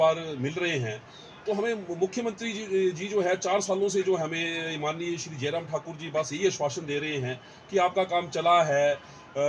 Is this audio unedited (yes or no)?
yes